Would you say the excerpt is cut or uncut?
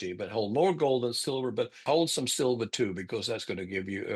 cut